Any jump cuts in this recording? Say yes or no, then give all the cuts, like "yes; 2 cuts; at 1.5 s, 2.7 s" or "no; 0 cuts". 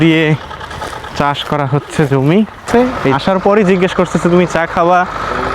yes; 1 cut; at 2.7 s